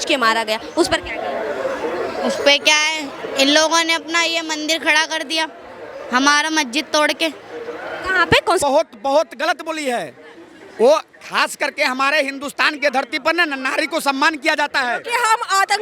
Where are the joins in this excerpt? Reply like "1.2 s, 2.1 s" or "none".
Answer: 8.6 s

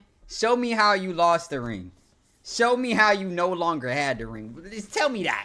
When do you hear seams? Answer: none

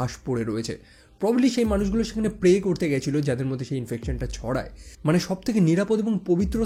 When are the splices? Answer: 4.9 s

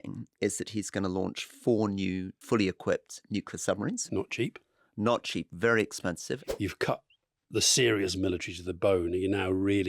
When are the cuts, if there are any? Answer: 2.3 s, 4.0 s, 6.4 s

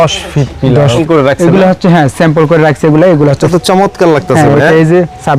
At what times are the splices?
1.0 s, 3.5 s

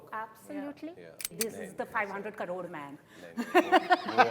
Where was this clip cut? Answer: 1.3 s

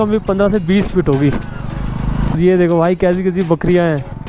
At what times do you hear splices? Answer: 2.4 s

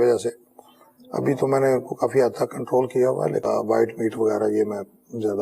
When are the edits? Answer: 3.4 s

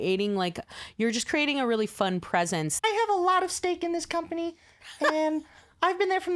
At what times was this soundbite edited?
2.7 s

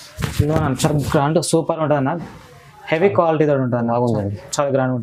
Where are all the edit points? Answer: none

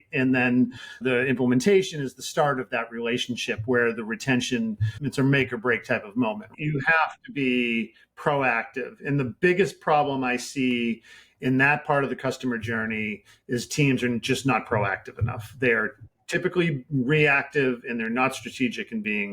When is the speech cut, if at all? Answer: 1.0 s, 5.0 s, 6.6 s

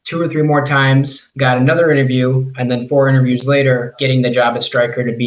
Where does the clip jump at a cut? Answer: 3.9 s

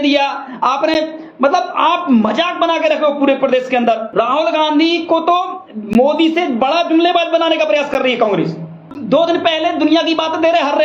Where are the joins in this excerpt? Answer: 4.1 s, 8.9 s

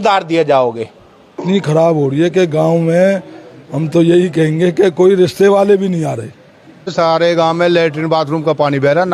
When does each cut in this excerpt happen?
1.3 s, 6.9 s

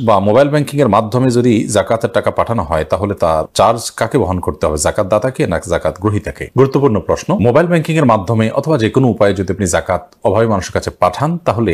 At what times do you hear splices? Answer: none

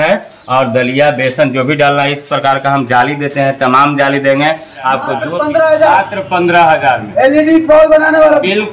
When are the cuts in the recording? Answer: 5.2 s

